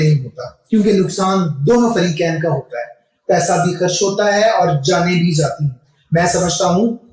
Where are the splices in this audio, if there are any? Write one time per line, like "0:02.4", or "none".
0:05.8